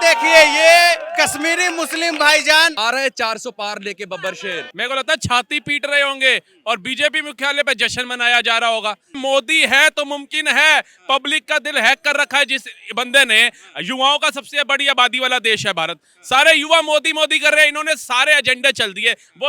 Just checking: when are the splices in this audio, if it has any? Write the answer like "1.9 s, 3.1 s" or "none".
2.7 s, 4.7 s, 9.2 s